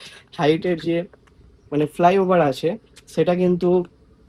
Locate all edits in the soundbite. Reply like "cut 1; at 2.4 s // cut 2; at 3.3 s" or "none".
none